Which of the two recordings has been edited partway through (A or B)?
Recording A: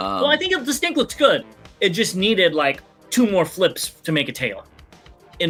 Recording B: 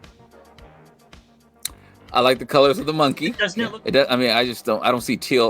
B